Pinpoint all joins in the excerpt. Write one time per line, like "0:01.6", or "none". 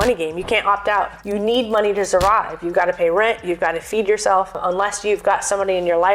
0:01.4
0:04.6